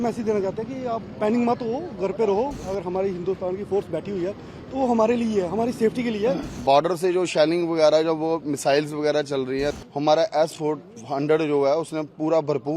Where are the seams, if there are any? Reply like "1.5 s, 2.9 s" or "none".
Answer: 2.6 s, 6.6 s, 9.8 s